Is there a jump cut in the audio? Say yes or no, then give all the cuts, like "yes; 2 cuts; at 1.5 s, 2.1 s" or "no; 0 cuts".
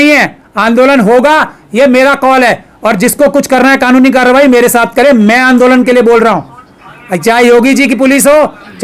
no; 0 cuts